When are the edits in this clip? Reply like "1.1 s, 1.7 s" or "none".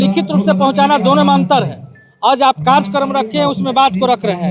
none